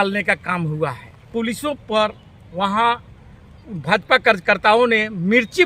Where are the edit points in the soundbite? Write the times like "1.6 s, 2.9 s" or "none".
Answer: 1.3 s